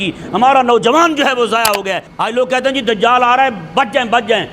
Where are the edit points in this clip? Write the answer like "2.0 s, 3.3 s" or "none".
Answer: 2.1 s